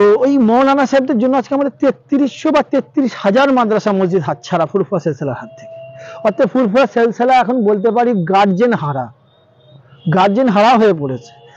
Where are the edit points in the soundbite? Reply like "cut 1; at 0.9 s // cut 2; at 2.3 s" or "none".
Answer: none